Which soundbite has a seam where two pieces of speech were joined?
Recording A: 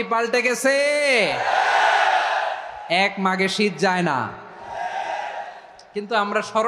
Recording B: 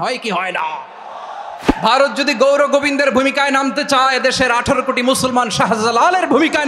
B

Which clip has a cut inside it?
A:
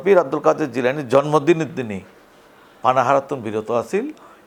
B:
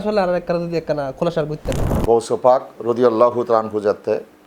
B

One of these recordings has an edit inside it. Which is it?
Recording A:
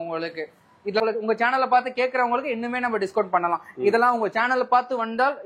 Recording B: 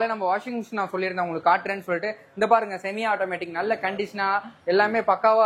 A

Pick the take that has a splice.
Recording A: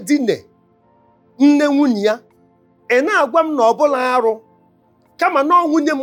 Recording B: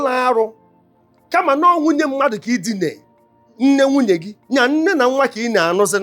B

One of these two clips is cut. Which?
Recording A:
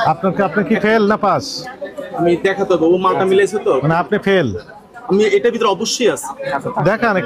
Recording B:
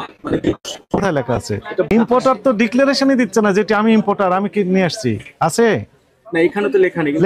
B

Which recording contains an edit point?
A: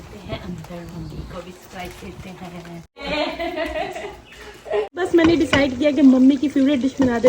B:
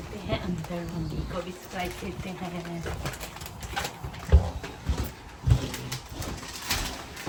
A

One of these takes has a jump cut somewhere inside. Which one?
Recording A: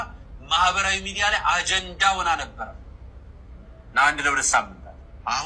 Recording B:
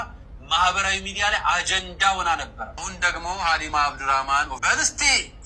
B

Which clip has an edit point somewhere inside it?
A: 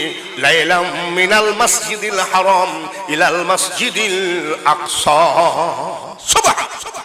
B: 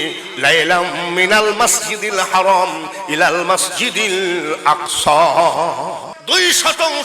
B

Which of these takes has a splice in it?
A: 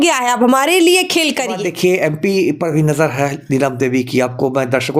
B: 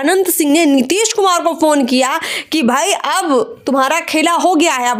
A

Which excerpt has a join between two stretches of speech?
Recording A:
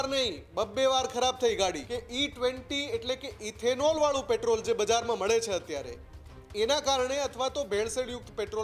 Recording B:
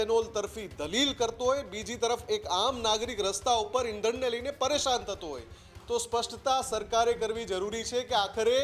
A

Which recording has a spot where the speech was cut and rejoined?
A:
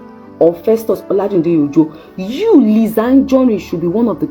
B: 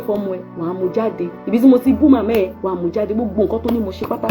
B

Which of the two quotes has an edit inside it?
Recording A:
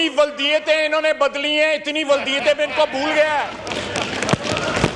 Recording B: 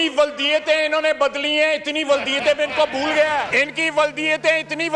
B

